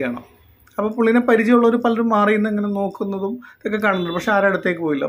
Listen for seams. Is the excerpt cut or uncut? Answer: uncut